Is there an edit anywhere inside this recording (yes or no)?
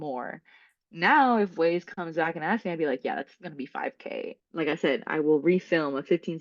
yes